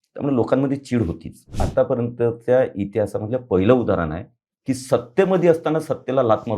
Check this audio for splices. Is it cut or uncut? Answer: cut